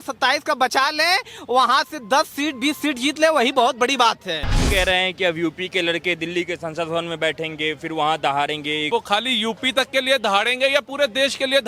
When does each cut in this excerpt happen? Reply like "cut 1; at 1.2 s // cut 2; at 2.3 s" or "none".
cut 1; at 4.6 s // cut 2; at 8.9 s